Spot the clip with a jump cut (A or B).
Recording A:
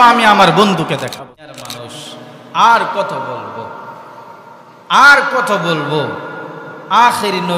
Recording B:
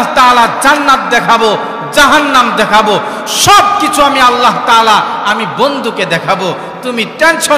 A